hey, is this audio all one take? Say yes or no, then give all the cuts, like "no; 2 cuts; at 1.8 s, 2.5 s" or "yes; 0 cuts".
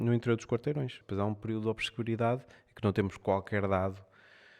no; 1 cut; at 1.0 s